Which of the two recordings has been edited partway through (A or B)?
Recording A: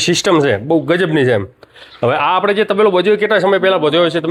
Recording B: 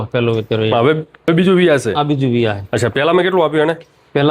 B